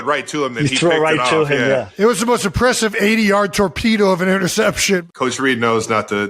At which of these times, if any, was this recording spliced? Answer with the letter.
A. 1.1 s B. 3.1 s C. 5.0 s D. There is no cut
C